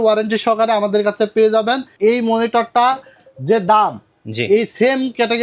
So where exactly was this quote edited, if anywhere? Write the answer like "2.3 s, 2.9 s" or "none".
1.9 s